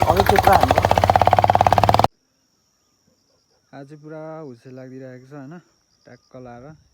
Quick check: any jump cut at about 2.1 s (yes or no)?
yes